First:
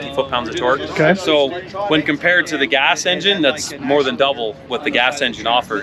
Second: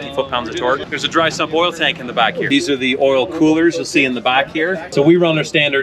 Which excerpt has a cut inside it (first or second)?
second